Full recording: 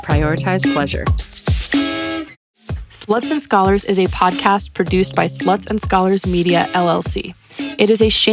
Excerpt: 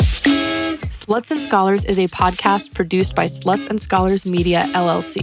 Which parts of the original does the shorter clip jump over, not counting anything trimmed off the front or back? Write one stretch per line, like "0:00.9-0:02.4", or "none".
0:02.4-0:02.9